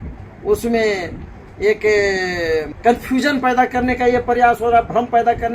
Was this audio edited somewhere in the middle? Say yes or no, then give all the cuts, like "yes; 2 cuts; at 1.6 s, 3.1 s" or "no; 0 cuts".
yes; 1 cut; at 2.7 s